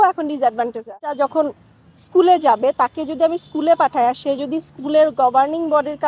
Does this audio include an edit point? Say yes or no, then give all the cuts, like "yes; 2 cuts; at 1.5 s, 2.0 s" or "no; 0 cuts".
yes; 1 cut; at 1.1 s